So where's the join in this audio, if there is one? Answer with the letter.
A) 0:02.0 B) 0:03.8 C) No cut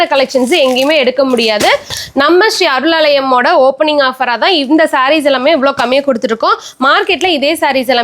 A